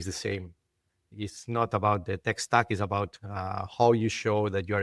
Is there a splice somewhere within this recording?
yes; 1 cut; at 1.0 s

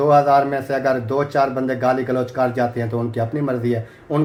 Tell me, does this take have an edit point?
no; 0 cuts

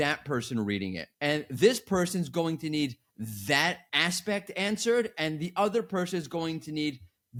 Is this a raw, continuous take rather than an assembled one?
yes; 0 cuts

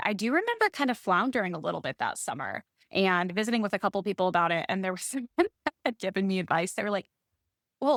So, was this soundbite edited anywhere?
no; 0 cuts

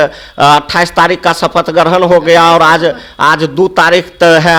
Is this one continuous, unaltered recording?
yes; 0 cuts

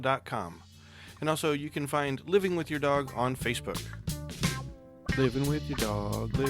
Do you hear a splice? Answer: yes; 1 cut; at 3.9 s

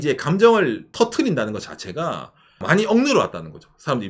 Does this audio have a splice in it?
yes; 2 cuts; at 0.9 s, 2.6 s

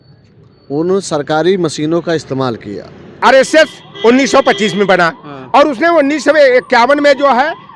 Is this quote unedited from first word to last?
yes; 0 cuts

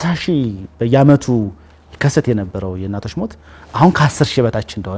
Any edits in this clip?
no; 0 cuts

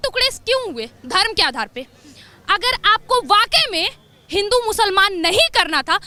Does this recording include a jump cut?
no; 0 cuts

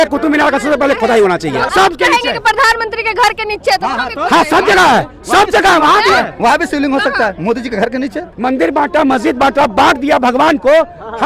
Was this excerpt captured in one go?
no; 2 cuts; at 1.6 s, 8.3 s

